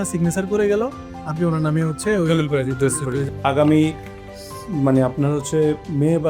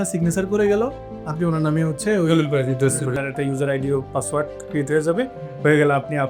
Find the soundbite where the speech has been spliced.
second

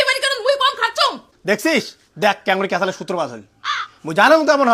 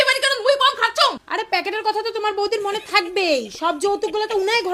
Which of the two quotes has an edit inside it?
second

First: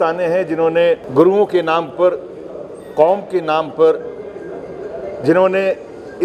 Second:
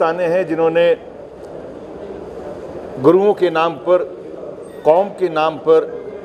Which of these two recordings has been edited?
first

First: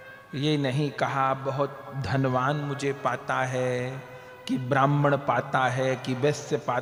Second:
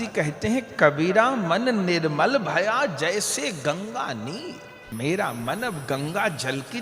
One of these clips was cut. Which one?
second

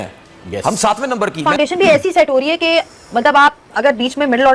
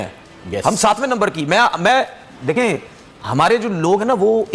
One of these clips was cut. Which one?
first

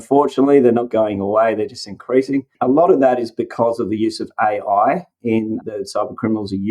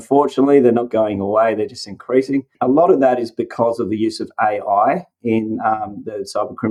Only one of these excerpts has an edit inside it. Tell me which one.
first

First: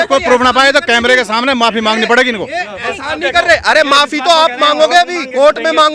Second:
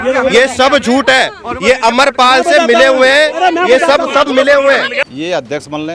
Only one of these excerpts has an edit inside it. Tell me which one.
second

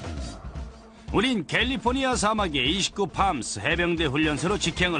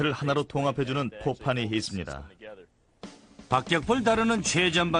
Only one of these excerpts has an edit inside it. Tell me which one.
second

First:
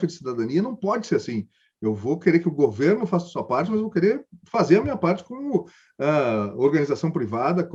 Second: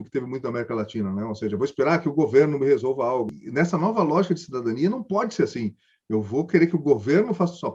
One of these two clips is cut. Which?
second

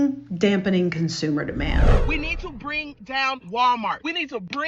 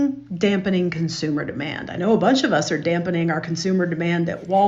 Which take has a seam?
first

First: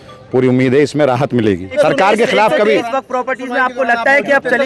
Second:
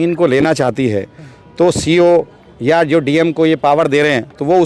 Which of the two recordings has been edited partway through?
first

